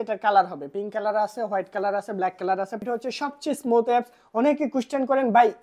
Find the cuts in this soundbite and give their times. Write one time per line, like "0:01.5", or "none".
0:02.8